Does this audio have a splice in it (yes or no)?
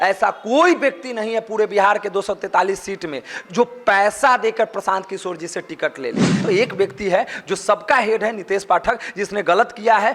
yes